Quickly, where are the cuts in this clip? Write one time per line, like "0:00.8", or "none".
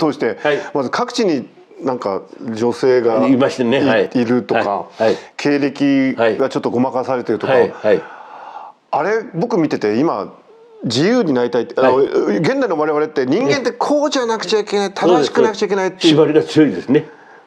none